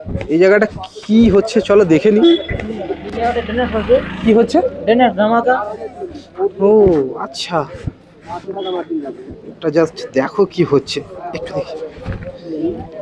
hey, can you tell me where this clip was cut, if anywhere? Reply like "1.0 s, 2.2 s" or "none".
none